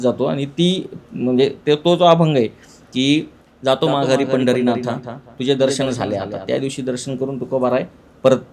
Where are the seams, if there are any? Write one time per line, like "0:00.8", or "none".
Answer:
0:03.4